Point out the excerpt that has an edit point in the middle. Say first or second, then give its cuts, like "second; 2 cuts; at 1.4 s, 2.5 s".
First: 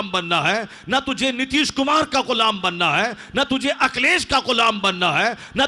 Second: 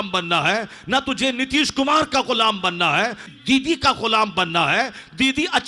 second; 1 cut; at 3.3 s